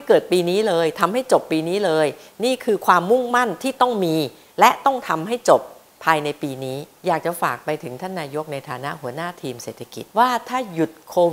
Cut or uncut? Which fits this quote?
cut